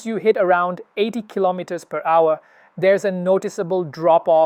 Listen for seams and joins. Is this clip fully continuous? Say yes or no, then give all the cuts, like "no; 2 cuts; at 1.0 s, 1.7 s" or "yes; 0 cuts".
yes; 0 cuts